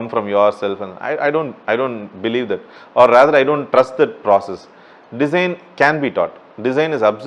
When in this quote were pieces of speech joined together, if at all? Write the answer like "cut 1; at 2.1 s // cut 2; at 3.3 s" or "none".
none